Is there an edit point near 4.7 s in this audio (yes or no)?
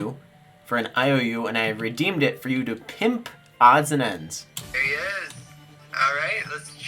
yes